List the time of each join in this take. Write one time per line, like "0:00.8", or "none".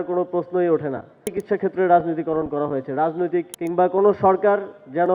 0:01.3
0:03.6